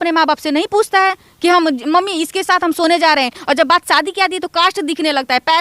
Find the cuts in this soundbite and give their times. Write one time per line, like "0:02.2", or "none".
0:03.4